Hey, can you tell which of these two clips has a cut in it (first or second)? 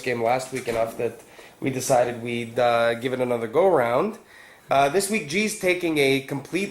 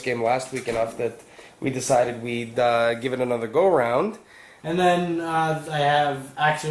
first